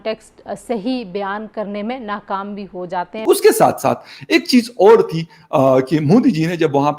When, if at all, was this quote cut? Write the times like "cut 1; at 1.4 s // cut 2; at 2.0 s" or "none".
cut 1; at 3.1 s

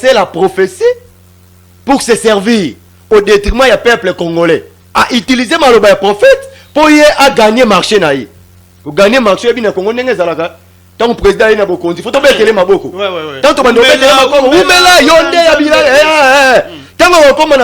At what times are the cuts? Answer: cut 1; at 5.0 s

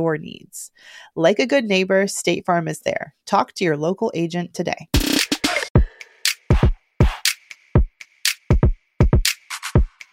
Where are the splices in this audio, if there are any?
cut 1; at 5.6 s

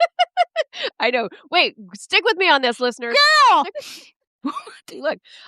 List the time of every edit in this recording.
cut 1; at 3.8 s

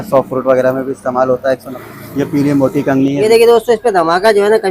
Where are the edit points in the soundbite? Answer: cut 1; at 1.7 s // cut 2; at 3.2 s

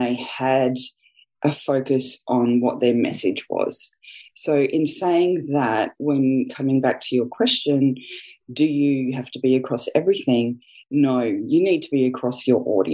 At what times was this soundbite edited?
none

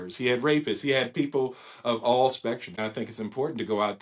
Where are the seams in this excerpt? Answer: cut 1; at 2.8 s

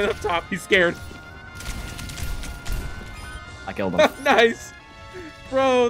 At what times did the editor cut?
none

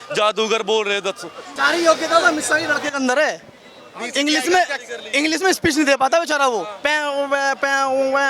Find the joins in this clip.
cut 1; at 1.6 s

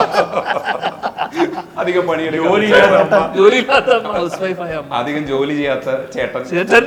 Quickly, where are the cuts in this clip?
none

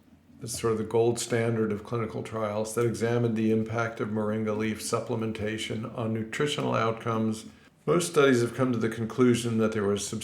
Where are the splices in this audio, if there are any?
cut 1; at 7.7 s

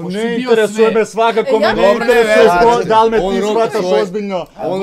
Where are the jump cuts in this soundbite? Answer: none

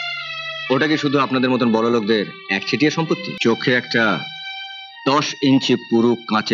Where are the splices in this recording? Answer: cut 1; at 3.3 s

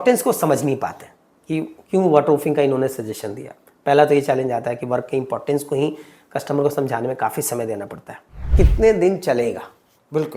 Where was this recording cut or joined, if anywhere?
cut 1; at 8.5 s

